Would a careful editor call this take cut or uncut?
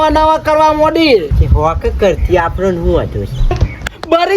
cut